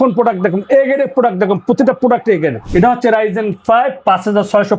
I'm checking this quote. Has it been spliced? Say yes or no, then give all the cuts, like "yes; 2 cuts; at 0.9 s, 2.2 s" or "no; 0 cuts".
yes; 1 cut; at 2.6 s